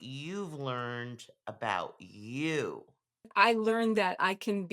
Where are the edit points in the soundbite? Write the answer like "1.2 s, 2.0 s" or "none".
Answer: 3.3 s